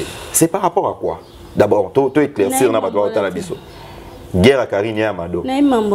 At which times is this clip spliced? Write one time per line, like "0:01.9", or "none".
none